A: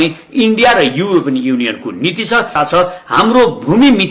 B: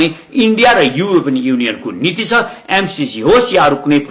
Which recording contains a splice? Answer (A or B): A